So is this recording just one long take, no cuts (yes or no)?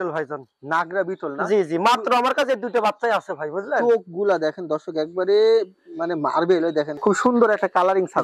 no